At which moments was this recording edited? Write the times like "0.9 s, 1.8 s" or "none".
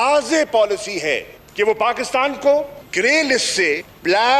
none